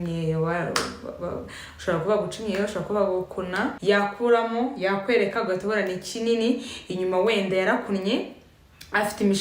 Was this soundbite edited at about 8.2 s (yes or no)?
no